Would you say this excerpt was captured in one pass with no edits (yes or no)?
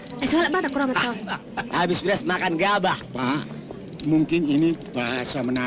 no